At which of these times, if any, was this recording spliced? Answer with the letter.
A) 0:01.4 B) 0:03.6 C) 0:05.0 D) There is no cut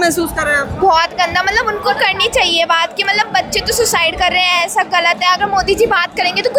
D